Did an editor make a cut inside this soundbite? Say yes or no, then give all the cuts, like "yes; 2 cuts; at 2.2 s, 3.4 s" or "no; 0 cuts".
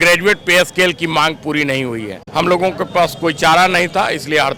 yes; 1 cut; at 2.2 s